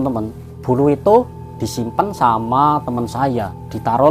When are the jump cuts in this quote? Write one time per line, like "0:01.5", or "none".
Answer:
none